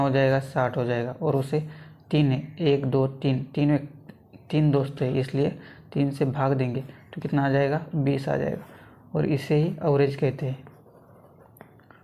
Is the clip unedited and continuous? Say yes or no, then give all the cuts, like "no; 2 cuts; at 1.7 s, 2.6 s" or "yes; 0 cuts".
yes; 0 cuts